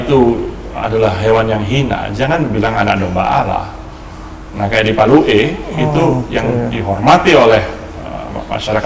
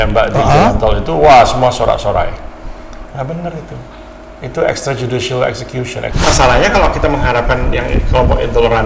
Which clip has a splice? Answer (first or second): second